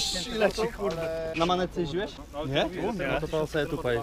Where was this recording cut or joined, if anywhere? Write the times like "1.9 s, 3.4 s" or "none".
1.3 s, 2.2 s